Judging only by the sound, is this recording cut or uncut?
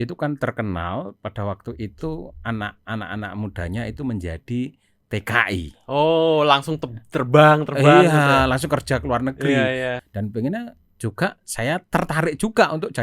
cut